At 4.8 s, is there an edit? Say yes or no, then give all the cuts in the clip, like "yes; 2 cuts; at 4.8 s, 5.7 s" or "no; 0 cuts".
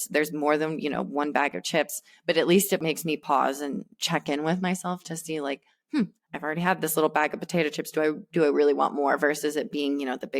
no; 1 cut; at 2.8 s